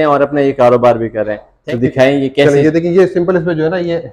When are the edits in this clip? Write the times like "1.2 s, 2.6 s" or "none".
1.5 s